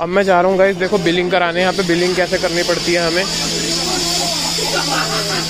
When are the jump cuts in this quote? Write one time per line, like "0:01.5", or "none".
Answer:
none